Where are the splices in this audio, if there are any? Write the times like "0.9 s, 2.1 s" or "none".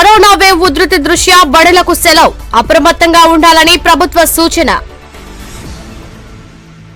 none